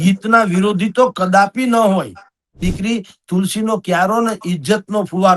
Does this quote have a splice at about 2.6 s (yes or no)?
yes